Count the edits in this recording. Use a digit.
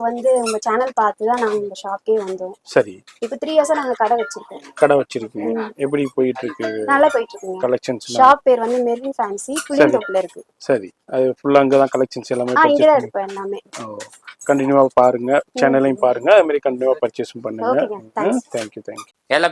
0